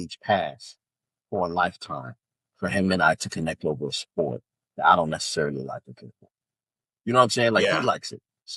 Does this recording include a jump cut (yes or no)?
no